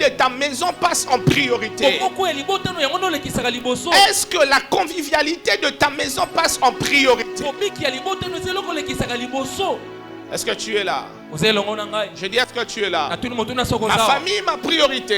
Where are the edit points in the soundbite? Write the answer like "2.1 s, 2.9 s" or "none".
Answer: none